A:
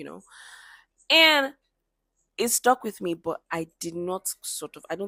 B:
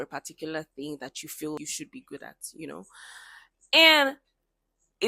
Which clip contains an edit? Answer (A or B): B